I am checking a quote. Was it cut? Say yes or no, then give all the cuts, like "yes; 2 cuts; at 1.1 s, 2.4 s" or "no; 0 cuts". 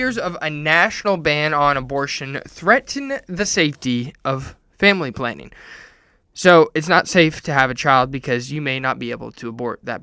no; 0 cuts